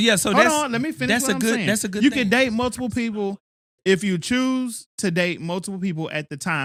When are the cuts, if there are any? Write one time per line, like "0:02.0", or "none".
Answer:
none